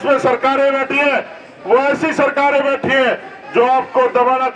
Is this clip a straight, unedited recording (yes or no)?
yes